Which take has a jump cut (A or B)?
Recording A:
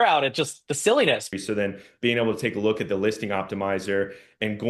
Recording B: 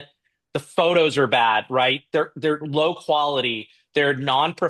A